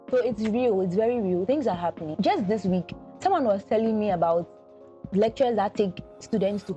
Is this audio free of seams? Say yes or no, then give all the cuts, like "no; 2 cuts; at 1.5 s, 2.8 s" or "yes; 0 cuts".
no; 1 cut; at 2.1 s